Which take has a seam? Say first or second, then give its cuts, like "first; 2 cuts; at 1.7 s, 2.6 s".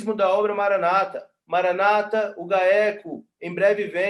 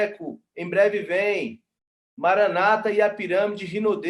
first; 1 cut; at 1.3 s